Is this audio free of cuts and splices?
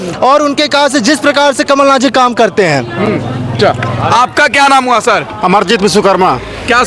yes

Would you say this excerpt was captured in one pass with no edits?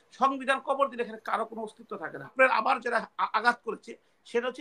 no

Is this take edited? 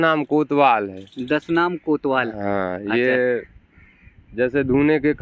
no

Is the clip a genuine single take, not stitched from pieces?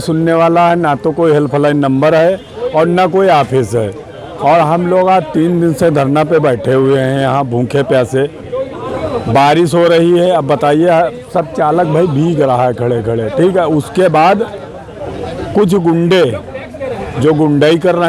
yes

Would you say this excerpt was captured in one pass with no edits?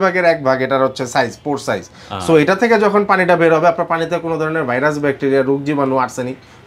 yes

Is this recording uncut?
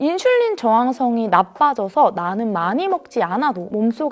yes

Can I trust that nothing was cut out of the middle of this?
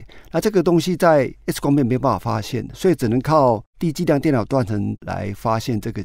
no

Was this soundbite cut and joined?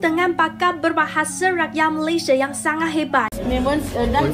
yes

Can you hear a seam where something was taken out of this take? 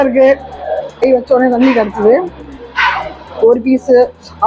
yes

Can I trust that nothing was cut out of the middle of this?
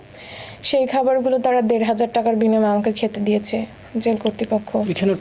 yes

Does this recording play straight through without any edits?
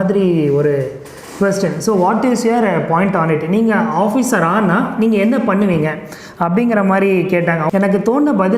no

